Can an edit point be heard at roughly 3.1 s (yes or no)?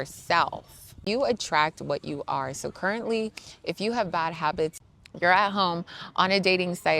no